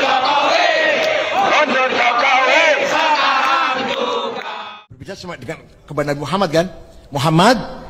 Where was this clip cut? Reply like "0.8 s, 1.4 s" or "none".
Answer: 4.5 s